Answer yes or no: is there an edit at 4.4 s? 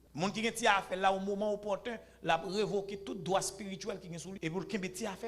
yes